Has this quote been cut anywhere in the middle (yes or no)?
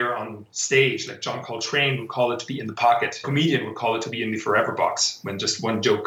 yes